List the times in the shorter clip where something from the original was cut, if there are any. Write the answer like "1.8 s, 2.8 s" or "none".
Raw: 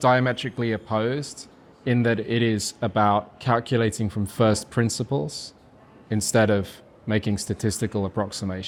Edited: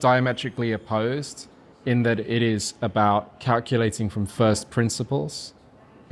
none